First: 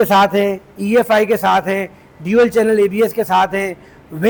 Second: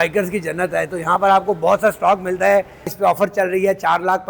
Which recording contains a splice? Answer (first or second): second